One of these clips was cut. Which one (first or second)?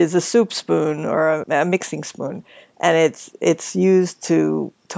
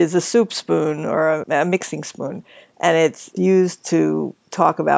second